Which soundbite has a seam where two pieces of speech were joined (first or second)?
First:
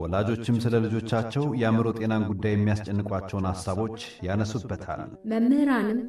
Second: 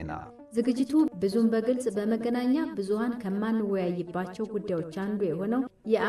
second